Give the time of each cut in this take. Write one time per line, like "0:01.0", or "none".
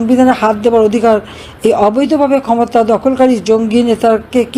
none